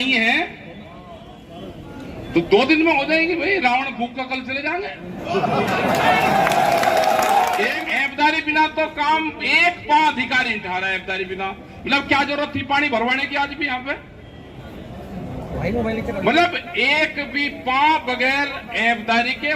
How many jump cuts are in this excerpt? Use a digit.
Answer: 1